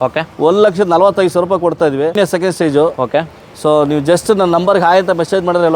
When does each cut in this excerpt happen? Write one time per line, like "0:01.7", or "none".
0:02.1